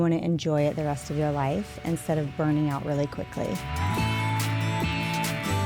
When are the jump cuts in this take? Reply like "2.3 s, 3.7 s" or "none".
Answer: 3.6 s